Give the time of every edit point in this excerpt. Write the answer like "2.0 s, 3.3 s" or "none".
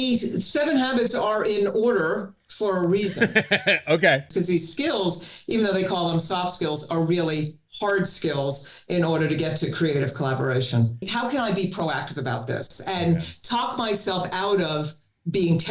4.3 s, 11.1 s